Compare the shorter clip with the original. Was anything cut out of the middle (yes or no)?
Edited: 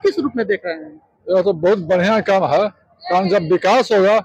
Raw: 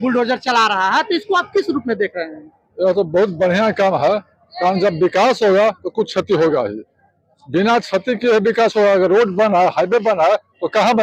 no